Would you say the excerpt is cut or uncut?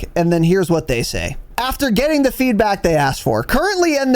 cut